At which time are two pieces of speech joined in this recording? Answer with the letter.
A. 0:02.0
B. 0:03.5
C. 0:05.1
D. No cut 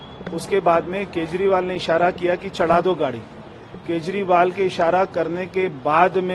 D